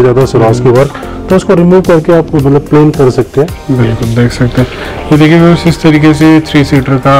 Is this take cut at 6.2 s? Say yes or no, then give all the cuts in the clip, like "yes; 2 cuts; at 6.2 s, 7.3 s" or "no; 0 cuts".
no; 0 cuts